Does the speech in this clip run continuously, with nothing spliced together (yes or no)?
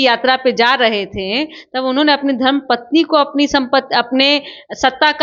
yes